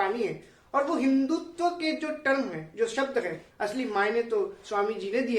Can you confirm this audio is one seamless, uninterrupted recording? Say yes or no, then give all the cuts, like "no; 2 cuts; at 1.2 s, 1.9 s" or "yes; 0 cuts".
no; 1 cut; at 3.4 s